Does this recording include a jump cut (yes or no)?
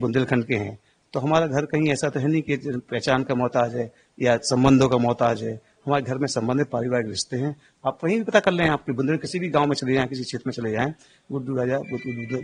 no